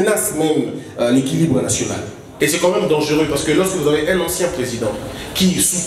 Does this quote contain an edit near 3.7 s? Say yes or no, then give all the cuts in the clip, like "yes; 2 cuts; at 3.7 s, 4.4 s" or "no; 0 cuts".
no; 1 cut; at 2.2 s